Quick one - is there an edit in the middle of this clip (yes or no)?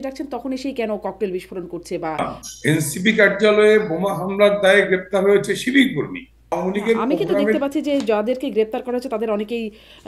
yes